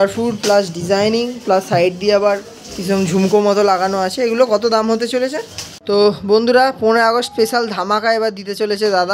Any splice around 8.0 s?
no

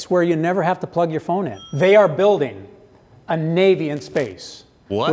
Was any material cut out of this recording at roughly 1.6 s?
yes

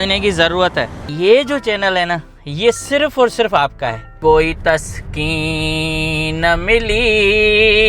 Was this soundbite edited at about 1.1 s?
yes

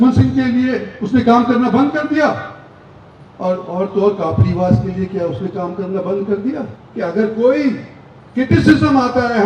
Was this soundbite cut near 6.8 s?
yes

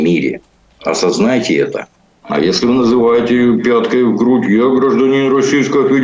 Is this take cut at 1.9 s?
yes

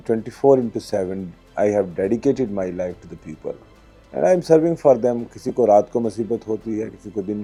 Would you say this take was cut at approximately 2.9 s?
no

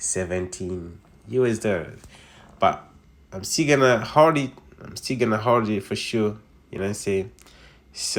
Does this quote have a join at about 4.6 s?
no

